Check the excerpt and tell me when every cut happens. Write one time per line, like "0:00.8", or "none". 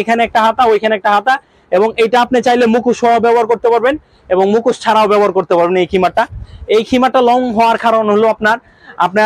none